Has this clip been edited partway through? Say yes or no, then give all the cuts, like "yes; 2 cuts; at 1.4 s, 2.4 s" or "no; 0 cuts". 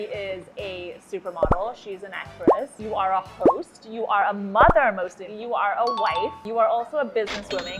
no; 0 cuts